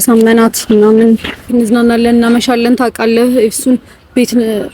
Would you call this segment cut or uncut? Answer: cut